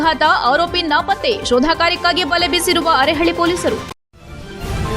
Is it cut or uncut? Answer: cut